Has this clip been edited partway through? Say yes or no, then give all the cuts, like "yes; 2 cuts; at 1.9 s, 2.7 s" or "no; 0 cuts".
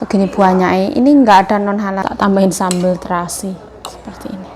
yes; 1 cut; at 2.1 s